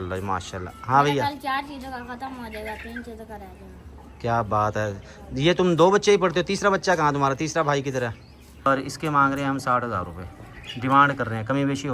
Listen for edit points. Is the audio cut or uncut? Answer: cut